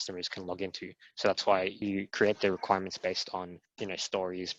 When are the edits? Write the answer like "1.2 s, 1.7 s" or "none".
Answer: 1.8 s, 3.6 s